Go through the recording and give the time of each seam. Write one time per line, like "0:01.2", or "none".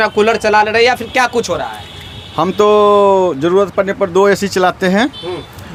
none